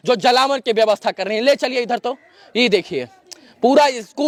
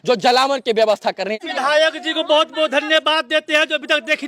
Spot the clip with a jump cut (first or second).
second